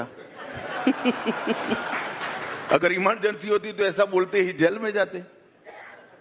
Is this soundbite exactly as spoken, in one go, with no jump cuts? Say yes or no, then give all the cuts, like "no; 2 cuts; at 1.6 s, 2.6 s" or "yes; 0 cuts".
yes; 0 cuts